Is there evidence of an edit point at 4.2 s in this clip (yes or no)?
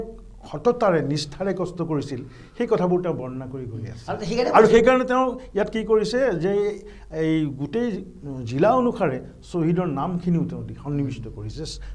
no